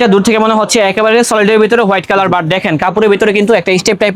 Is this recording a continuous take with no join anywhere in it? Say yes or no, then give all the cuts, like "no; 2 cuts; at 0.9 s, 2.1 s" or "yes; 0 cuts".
yes; 0 cuts